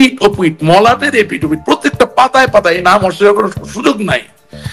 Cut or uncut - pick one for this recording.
uncut